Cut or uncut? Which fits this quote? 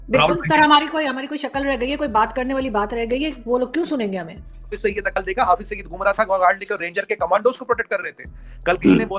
cut